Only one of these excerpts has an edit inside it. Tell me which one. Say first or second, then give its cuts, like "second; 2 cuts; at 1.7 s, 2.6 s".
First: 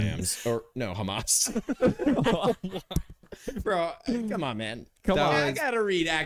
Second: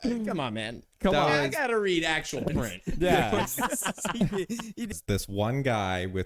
second; 1 cut; at 4.9 s